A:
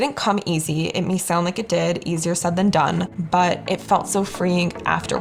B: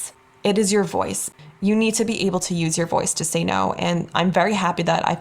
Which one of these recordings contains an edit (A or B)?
B